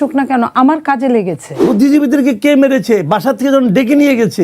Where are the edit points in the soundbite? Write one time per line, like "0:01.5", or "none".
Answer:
0:01.6